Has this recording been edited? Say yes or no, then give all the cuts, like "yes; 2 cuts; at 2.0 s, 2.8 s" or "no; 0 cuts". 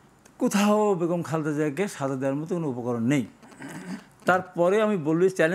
no; 0 cuts